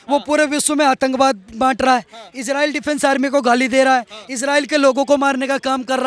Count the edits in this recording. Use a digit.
0